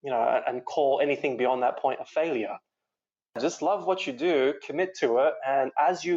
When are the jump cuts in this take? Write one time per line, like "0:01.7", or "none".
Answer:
0:03.4